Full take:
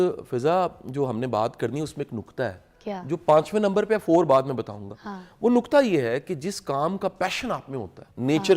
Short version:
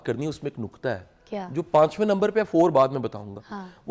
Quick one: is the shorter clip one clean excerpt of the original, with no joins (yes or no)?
yes